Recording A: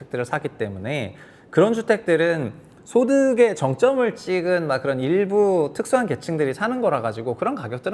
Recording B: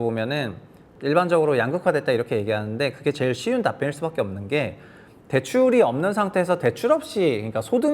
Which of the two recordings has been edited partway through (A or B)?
B